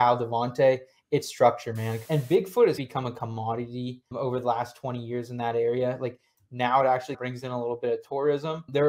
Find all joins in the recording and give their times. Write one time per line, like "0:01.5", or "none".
0:02.0

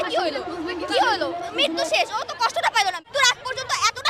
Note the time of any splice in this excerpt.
0:03.1

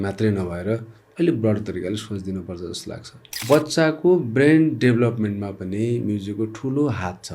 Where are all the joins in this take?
0:03.4

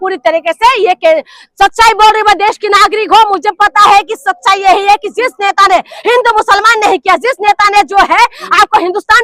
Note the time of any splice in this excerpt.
0:01.4

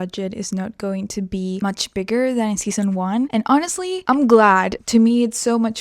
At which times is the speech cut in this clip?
0:01.6
0:03.3
0:04.0
0:04.8

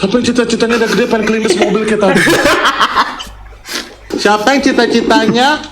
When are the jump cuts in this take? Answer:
0:04.1

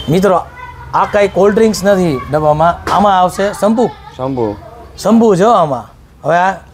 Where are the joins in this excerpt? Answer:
none

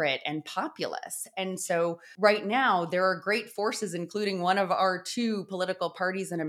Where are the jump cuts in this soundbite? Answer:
0:02.1

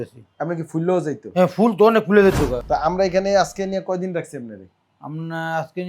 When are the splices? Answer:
0:02.6

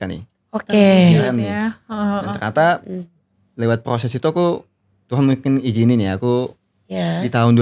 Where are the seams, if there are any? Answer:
none

